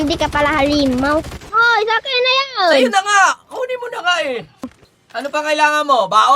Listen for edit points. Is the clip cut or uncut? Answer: cut